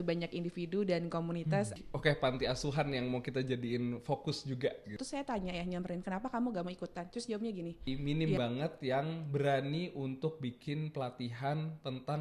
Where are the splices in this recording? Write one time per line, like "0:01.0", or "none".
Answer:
0:01.8
0:05.0
0:07.9